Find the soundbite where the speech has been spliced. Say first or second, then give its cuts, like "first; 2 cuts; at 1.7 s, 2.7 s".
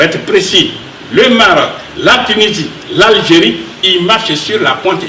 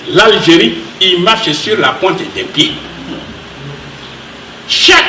second; 1 cut; at 3.8 s